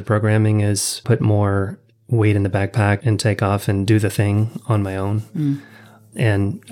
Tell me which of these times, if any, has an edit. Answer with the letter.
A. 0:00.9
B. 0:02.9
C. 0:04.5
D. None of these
A